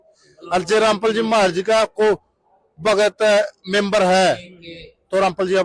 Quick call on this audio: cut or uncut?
uncut